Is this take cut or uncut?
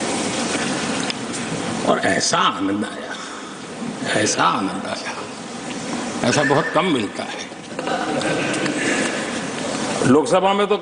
uncut